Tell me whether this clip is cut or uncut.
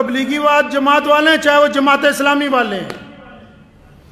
uncut